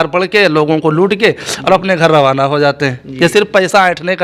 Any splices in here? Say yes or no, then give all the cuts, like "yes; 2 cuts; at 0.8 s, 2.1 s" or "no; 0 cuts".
no; 0 cuts